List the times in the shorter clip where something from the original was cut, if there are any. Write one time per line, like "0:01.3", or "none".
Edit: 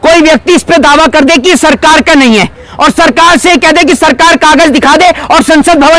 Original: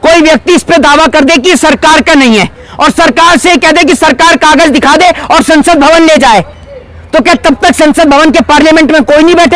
none